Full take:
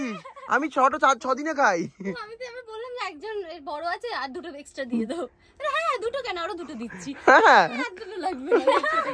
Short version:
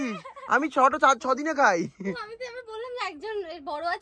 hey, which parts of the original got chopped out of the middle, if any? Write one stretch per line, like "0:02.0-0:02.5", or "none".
none

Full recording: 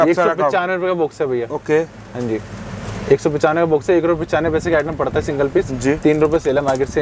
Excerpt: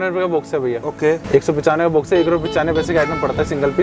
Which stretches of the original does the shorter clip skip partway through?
0:01.9-0:03.0

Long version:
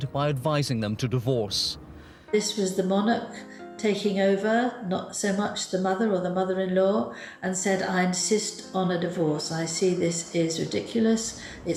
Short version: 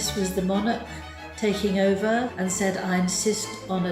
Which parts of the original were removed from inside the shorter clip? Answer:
0:04.7-0:07.4

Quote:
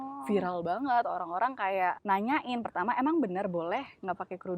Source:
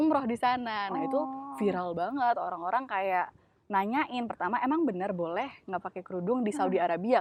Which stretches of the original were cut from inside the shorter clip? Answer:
0:03.3-0:03.6

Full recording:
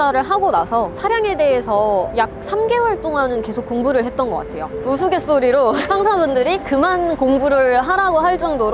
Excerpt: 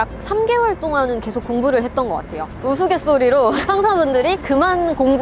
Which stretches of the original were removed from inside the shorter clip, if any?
none

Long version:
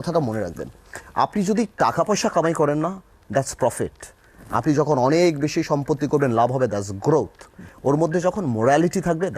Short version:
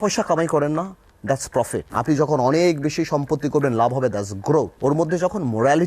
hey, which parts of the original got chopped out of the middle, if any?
0:03.9-0:04.5
0:07.3-0:07.7

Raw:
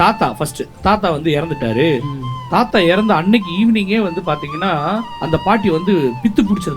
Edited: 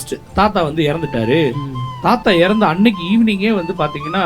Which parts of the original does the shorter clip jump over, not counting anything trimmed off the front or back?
none

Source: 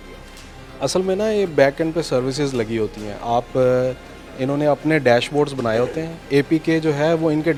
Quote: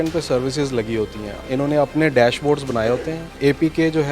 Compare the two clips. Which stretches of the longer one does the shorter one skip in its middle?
0:03.1-0:04.2

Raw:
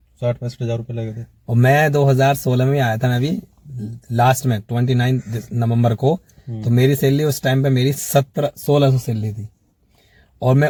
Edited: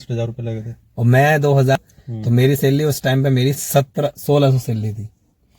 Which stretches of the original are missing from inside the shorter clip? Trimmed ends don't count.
0:02.3-0:06.2

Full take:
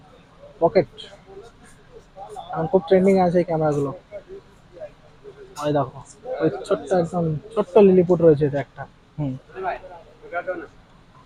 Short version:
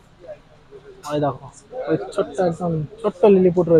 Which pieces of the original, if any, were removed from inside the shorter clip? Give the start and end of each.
none

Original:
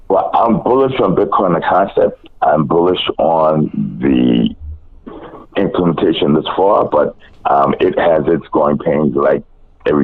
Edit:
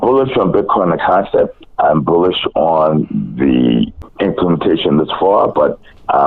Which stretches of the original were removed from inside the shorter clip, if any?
0:04.7-0:05.4

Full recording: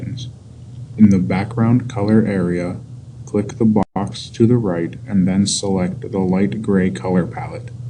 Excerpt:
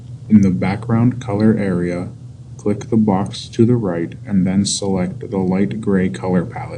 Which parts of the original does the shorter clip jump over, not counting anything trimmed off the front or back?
0:03.8-0:04.0

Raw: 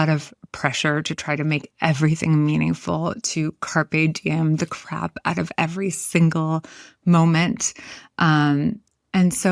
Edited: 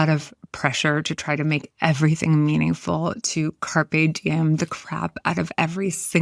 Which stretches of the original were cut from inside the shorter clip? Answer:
none

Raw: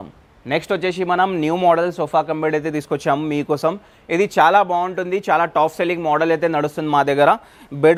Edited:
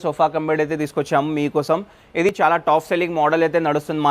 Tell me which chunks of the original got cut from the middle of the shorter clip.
0:04.3-0:05.2

